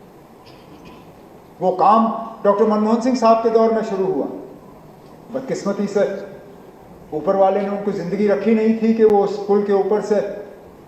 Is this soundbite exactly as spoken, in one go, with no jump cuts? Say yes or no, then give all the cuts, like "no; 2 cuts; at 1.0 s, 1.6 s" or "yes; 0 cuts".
yes; 0 cuts